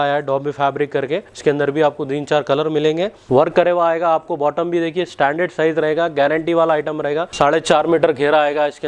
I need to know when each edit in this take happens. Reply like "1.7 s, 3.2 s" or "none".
1.3 s, 3.2 s, 7.3 s